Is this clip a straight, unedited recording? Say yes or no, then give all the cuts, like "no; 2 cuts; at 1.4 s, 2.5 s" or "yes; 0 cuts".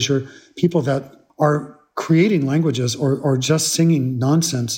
no; 1 cut; at 1.2 s